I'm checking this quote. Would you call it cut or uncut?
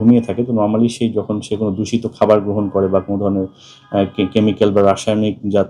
uncut